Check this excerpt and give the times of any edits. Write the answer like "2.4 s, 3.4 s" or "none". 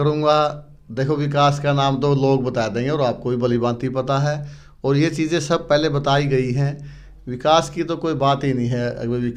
none

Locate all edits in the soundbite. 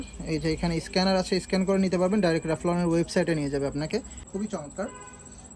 4.2 s

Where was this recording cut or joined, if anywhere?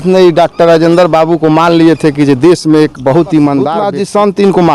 3.8 s

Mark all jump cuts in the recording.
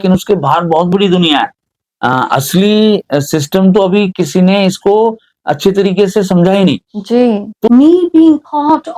7.7 s

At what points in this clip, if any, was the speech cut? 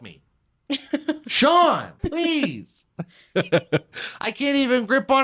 1.9 s

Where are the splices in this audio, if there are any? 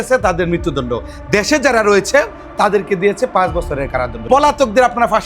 4.1 s

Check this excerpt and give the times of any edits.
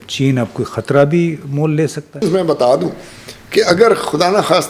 2.2 s

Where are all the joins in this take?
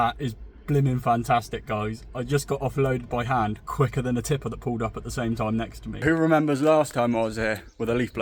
6.0 s

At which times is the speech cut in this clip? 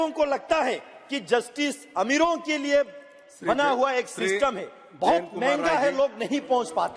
none

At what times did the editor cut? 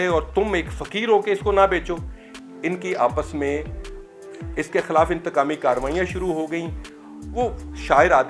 none

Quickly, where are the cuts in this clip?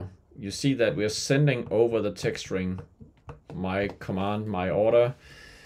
none

